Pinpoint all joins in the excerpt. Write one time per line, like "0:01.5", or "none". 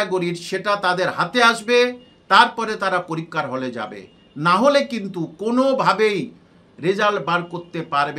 none

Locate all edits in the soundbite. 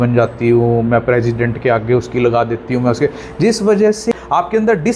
0:04.1

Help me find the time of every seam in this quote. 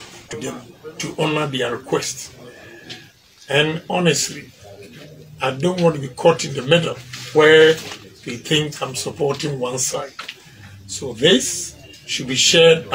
none

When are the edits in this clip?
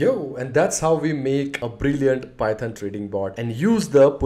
none

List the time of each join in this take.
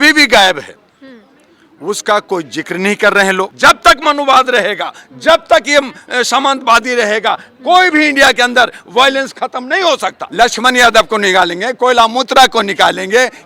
0:03.5
0:10.2

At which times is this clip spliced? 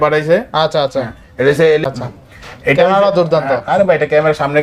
0:01.8

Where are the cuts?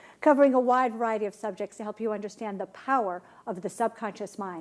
0:02.2

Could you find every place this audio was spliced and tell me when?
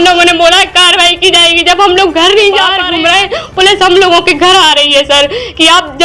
0:02.8

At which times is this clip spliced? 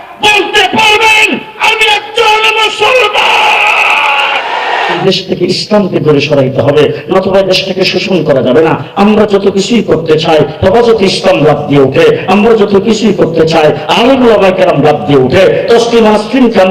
0:05.0

